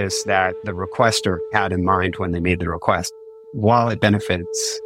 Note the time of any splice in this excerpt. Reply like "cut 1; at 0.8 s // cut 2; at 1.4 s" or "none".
cut 1; at 1.5 s // cut 2; at 3.1 s